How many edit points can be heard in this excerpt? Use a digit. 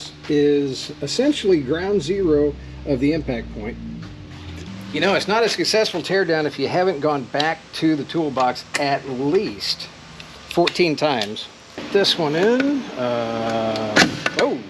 2